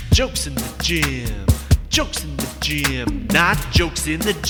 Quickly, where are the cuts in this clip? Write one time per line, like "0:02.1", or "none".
none